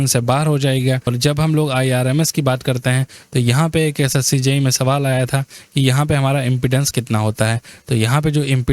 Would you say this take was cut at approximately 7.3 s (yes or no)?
no